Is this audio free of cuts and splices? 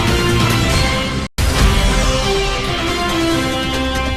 no; 1 cut; at 1.3 s

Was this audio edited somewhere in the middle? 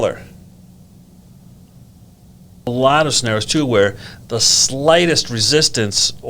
yes; 1 cut; at 2.7 s

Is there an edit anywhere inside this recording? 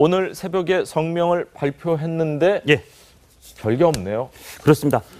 no; 0 cuts

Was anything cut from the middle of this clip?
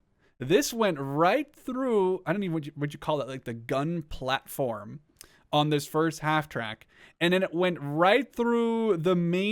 no; 0 cuts

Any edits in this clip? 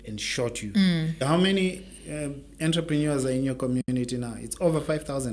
yes; 1 cut; at 1.2 s

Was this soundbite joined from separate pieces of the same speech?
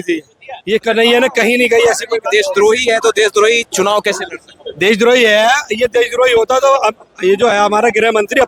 no; 0 cuts

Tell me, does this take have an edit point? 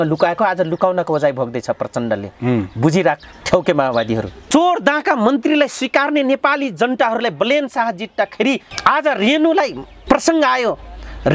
yes; 3 cuts; at 4.3 s, 8.7 s, 9.9 s

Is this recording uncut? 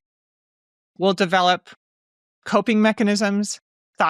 yes; 0 cuts

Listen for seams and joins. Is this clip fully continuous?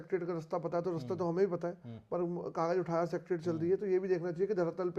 yes; 0 cuts

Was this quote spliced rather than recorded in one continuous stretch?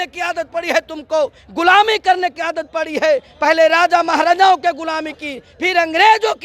no; 0 cuts

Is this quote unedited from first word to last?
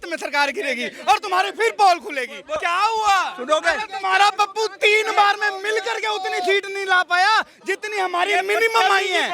no; 1 cut; at 2.5 s

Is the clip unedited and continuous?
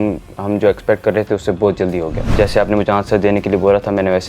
no; 1 cut; at 2.3 s

